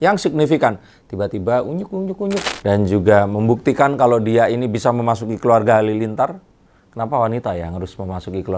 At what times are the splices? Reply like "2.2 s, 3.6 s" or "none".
2.5 s